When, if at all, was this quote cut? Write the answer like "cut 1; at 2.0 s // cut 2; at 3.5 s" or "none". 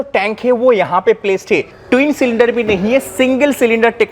cut 1; at 1.7 s

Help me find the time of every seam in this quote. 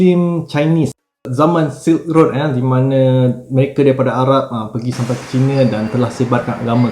cut 1; at 1.3 s

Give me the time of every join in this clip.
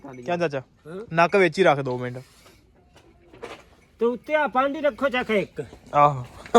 none

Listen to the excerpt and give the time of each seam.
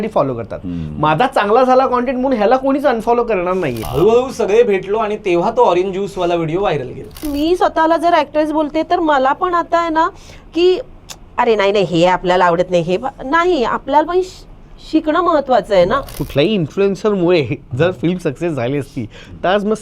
cut 1; at 3.8 s // cut 2; at 7.3 s // cut 3; at 16.2 s

